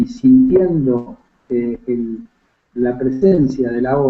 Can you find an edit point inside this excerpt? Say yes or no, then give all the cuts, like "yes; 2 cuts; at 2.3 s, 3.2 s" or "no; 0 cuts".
yes; 1 cut; at 2.4 s